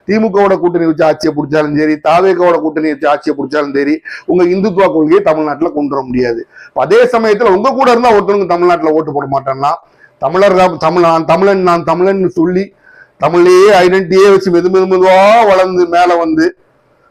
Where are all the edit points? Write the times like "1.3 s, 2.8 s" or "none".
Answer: none

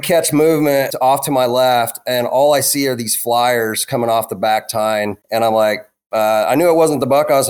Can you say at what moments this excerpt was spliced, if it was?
0.9 s, 5.2 s

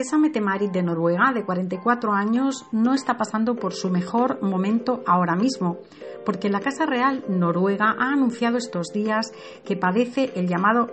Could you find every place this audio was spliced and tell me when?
3.4 s

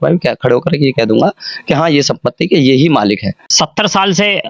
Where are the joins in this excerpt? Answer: 3.4 s

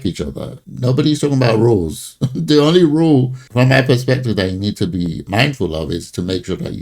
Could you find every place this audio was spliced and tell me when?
5.2 s

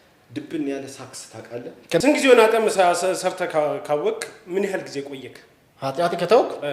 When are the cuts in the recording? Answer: 2.0 s

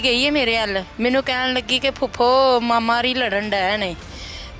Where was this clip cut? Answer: 0.9 s

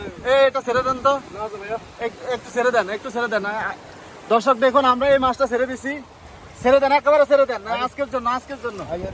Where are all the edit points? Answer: none

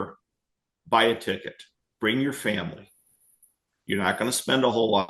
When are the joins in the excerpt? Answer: none

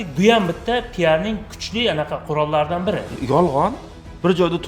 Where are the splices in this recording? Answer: 3.2 s

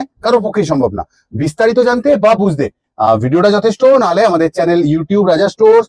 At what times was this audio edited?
none

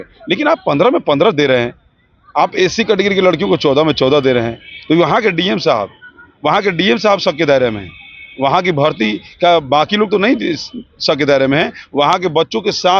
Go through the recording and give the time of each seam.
none

